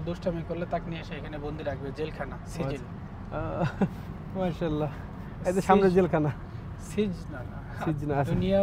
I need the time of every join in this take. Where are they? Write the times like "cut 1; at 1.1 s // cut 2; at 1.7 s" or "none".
none